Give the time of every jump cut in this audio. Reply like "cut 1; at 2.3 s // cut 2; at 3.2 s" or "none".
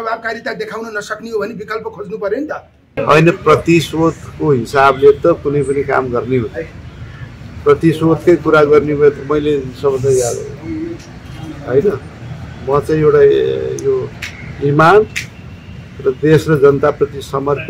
cut 1; at 3.0 s